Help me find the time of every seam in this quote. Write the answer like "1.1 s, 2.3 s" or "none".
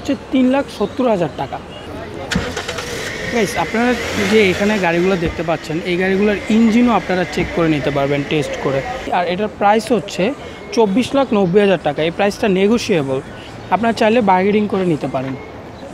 1.9 s, 9.1 s